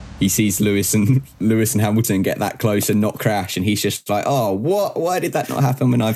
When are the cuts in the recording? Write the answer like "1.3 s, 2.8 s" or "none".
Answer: none